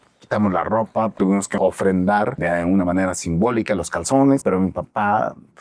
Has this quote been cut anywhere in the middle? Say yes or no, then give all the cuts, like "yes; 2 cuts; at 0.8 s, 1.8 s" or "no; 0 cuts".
yes; 3 cuts; at 1.5 s, 2.4 s, 4.4 s